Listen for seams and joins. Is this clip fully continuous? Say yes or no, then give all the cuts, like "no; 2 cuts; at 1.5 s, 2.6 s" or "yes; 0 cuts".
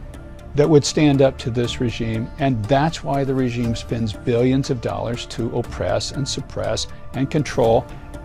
yes; 0 cuts